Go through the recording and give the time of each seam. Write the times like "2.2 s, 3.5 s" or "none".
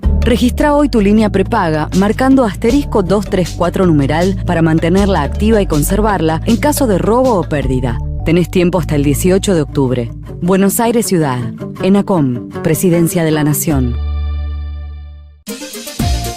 15.4 s